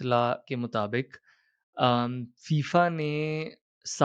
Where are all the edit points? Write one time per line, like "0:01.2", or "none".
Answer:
none